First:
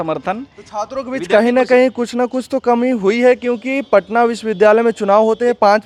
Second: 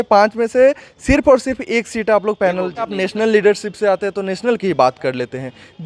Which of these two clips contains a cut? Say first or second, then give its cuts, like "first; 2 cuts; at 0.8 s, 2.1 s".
second; 1 cut; at 2.9 s